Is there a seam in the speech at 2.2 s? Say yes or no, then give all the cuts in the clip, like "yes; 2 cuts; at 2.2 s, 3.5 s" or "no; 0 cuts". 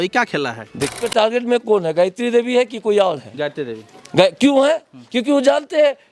no; 1 cut; at 1.0 s